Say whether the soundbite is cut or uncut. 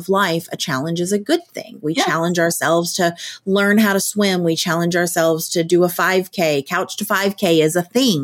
uncut